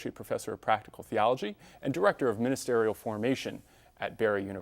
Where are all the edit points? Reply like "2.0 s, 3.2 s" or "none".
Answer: 2.8 s